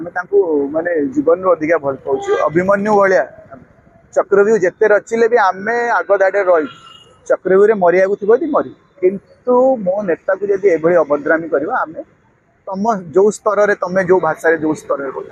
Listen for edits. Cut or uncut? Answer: uncut